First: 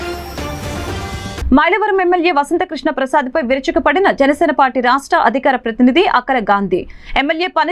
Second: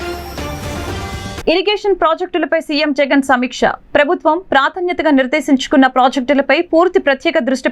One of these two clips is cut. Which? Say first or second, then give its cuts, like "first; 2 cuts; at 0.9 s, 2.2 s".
second; 1 cut; at 1.1 s